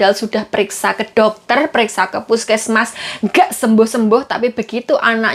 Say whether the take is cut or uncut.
uncut